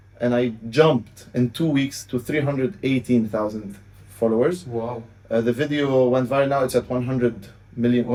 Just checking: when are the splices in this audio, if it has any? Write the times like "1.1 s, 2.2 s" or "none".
none

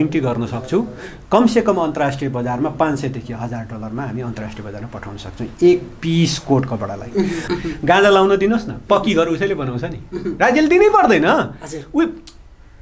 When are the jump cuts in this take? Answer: 7.4 s

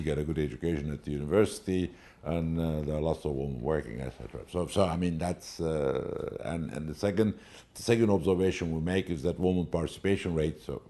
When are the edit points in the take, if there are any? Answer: none

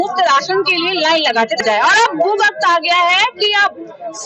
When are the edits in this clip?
1.6 s

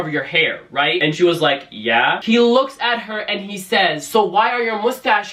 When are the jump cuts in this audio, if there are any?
2.2 s

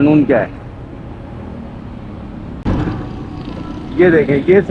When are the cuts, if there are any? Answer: 2.6 s

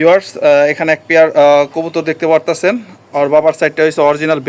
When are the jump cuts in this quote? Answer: none

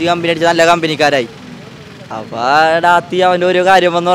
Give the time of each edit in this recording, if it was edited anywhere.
none

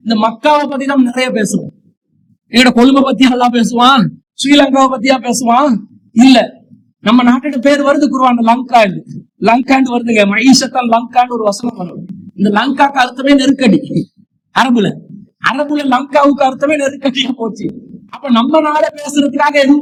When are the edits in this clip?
none

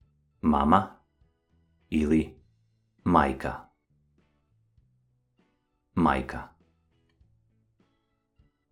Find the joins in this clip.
none

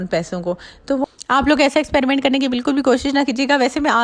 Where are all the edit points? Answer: 1.0 s

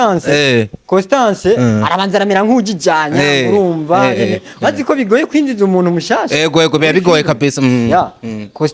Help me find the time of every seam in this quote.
none

